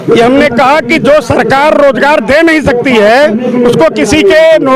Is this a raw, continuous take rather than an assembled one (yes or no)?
yes